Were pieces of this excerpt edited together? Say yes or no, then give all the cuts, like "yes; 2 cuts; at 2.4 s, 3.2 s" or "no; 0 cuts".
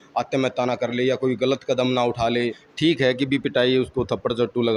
yes; 1 cut; at 2.8 s